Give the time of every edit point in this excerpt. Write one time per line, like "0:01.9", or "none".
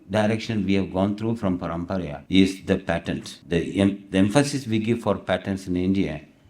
0:02.2
0:03.3